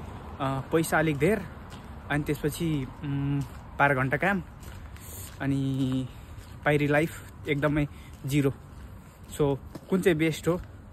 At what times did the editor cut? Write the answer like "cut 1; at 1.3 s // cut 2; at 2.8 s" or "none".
none

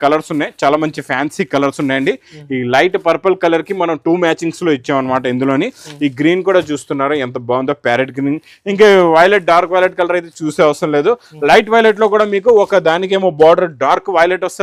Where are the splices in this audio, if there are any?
none

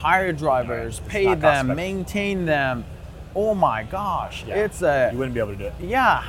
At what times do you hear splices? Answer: none

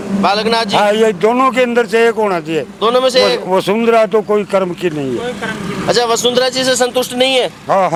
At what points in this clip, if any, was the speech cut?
none

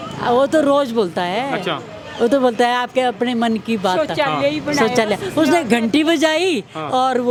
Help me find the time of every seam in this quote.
none

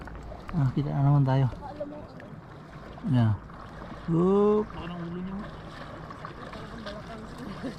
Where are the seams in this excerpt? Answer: none

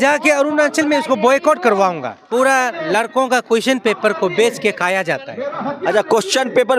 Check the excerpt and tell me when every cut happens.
cut 1; at 2.1 s

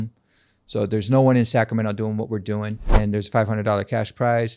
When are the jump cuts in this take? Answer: cut 1; at 3.0 s

